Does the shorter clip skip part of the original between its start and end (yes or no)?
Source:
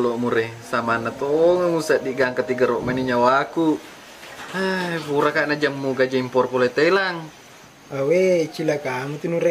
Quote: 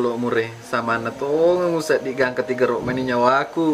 no